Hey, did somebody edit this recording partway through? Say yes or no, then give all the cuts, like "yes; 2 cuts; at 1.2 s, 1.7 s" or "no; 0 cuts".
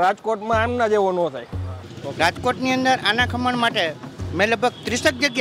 yes; 1 cut; at 1.8 s